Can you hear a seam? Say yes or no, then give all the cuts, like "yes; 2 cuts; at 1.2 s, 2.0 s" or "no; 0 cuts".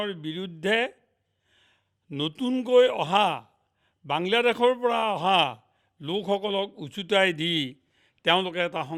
no; 0 cuts